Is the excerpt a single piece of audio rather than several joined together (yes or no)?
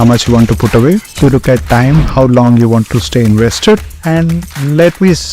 no